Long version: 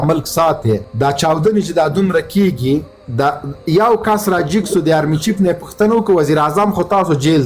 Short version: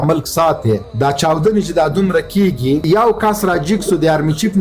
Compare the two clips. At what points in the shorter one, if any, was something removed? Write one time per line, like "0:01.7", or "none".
0:02.8